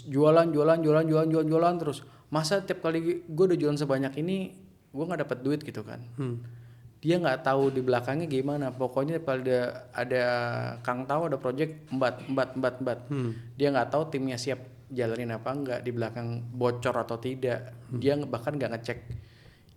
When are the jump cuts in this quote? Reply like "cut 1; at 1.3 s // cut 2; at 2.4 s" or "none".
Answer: none